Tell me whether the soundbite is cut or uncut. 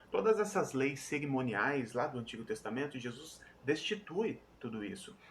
cut